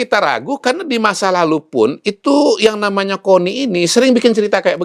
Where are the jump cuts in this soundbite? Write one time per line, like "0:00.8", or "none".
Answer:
0:03.9